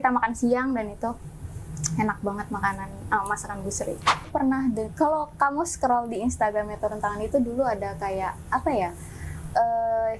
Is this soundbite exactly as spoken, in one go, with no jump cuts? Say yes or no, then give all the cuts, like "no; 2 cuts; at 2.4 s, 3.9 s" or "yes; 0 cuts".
no; 1 cut; at 4.3 s